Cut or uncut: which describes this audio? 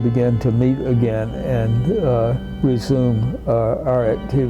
uncut